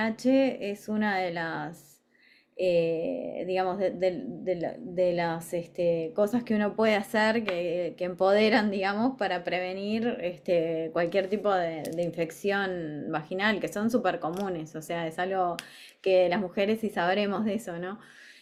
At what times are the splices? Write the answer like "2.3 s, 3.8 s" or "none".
none